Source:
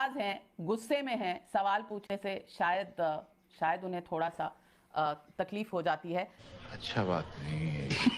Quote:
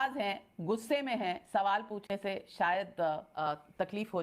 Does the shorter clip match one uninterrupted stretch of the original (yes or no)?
no